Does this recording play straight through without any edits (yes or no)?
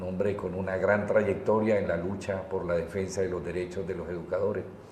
no